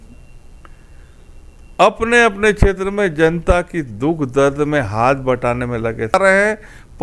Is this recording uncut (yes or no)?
no